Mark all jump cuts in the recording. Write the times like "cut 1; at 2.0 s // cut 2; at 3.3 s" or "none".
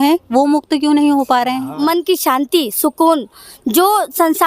cut 1; at 1.7 s